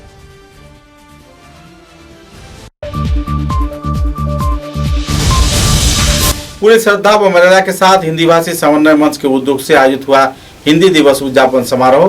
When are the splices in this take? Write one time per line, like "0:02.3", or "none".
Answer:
0:02.7
0:06.4